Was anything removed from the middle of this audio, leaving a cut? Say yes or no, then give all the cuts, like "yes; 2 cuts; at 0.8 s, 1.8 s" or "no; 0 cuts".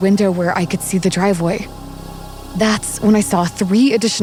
no; 0 cuts